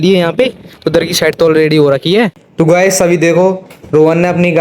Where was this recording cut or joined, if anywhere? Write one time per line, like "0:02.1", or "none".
0:02.4